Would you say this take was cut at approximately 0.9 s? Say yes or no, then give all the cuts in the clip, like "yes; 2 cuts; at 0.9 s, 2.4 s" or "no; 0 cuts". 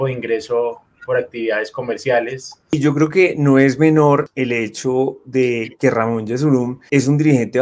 no; 3 cuts; at 2.7 s, 4.3 s, 6.8 s